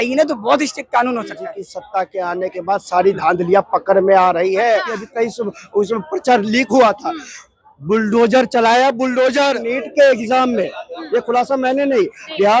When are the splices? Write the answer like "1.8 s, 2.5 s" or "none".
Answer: 1.4 s, 5.0 s, 9.8 s